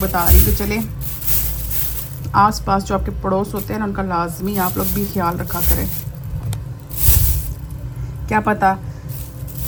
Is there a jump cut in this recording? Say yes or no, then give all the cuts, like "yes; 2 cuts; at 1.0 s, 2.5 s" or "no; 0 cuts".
no; 0 cuts